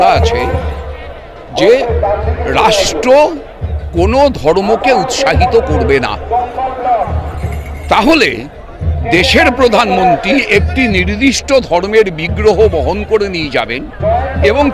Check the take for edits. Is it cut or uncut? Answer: uncut